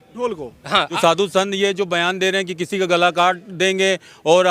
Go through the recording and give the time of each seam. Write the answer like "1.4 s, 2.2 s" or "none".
1.0 s